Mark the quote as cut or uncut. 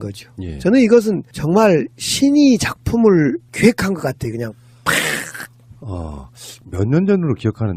cut